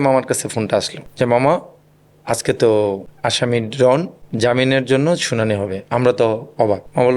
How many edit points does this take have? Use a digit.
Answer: 0